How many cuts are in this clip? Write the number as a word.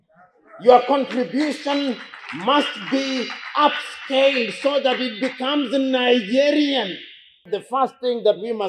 one